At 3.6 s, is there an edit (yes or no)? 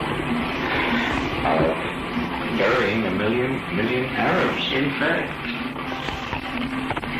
yes